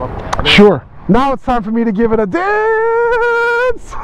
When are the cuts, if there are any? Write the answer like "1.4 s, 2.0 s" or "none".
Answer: 0.9 s